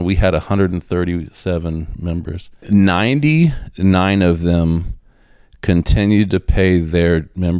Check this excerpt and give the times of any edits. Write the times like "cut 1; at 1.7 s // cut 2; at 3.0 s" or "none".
cut 1; at 2.7 s